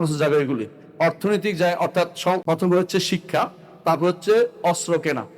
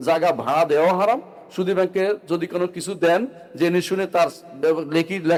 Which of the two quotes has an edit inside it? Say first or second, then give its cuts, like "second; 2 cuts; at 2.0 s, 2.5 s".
first; 1 cut; at 2.4 s